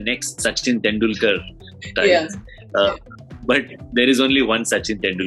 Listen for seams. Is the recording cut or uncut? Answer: uncut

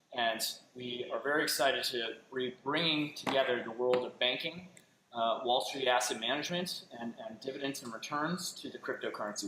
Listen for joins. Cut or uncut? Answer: uncut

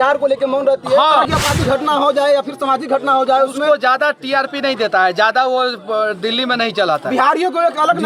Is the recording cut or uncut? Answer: cut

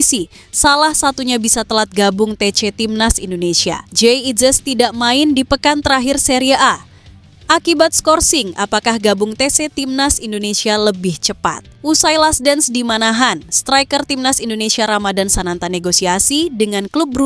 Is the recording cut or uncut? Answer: cut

